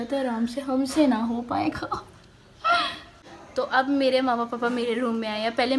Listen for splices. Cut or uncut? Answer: cut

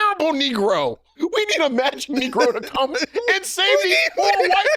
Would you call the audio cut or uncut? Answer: cut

